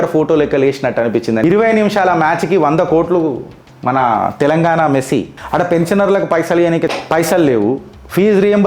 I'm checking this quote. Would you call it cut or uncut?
cut